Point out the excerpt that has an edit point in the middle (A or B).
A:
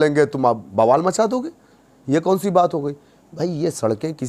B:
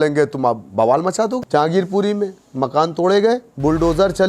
B